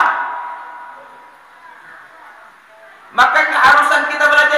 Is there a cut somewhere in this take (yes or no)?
no